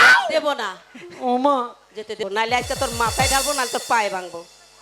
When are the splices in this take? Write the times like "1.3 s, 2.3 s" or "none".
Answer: 2.2 s